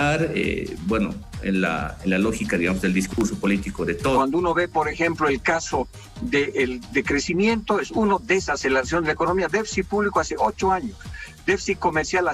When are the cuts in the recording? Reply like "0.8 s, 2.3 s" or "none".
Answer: 4.2 s